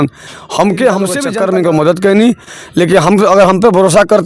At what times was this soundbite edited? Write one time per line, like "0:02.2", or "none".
0:01.2